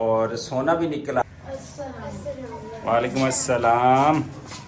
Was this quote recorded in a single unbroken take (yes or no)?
no